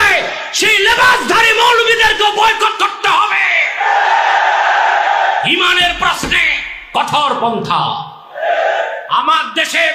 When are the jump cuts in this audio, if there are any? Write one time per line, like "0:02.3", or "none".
0:08.9